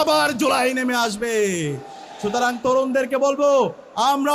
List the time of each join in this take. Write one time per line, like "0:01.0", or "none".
none